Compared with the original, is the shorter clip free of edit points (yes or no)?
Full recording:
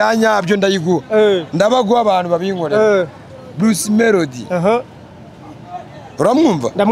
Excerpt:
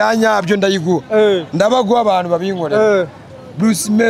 yes